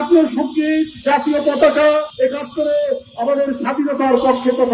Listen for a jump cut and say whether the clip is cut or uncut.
cut